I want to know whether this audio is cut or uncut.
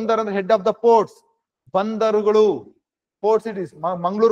uncut